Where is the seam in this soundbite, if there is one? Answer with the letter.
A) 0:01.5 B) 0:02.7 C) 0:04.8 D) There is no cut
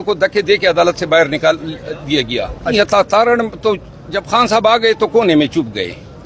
B